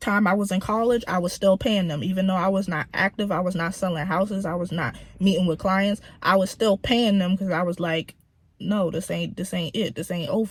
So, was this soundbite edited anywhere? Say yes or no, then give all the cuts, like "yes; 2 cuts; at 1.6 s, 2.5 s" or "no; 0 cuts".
no; 0 cuts